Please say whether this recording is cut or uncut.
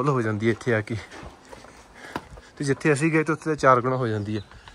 uncut